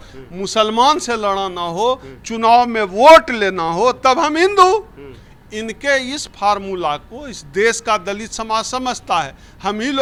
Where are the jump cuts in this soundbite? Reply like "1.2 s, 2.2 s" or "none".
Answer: none